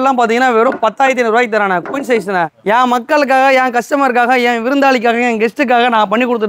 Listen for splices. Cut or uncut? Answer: uncut